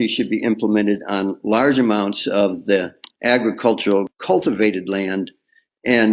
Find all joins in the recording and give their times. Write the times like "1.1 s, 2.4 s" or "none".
none